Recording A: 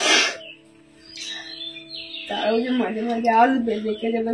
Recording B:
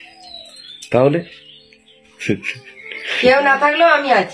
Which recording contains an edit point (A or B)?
B